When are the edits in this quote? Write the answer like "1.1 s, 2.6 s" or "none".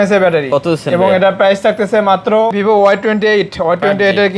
2.5 s